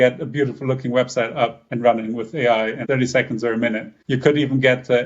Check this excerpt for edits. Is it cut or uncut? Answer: cut